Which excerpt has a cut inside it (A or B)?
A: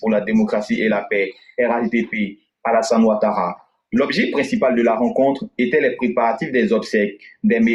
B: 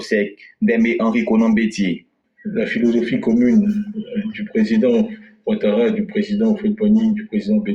B